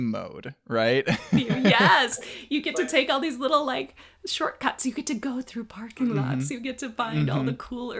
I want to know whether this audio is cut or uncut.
uncut